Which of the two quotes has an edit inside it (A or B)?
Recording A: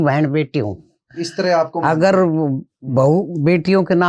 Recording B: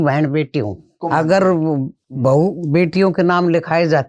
B